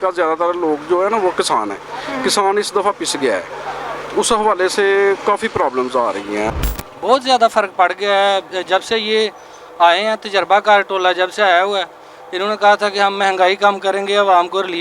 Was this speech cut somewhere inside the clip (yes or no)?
yes